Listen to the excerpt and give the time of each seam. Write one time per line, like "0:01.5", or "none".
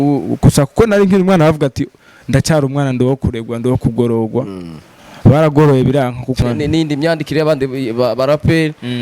0:06.4